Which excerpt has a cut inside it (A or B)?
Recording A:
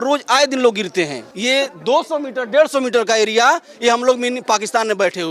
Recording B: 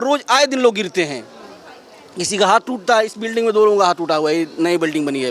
A